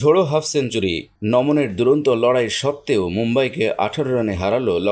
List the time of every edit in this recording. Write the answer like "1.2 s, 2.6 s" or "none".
none